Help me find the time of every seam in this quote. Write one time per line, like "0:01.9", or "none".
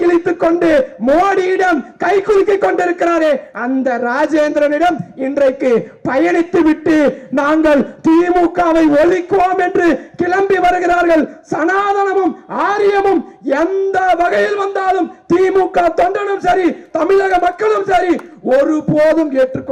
none